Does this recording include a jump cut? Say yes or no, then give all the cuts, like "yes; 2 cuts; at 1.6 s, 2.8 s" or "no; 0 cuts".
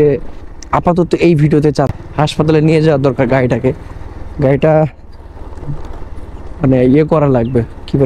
yes; 1 cut; at 1.9 s